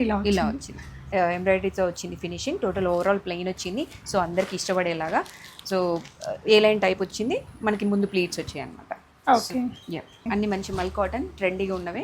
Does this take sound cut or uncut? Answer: cut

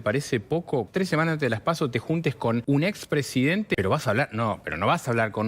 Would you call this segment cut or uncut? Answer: cut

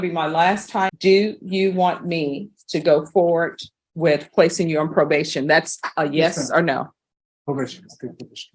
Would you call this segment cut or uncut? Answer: cut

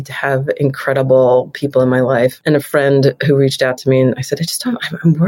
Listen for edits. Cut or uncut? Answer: cut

